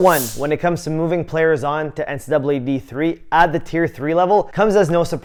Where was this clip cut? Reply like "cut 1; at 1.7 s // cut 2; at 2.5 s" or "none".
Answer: none